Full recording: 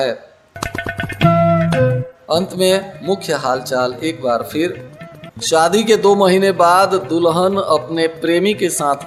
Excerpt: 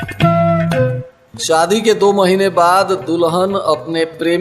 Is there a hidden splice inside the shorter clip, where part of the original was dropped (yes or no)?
yes